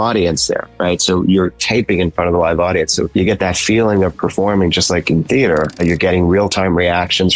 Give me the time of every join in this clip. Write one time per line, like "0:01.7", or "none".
0:03.1
0:05.8